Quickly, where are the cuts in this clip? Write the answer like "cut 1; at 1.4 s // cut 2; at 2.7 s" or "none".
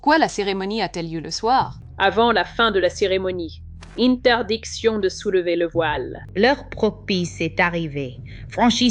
cut 1; at 1.8 s // cut 2; at 6.2 s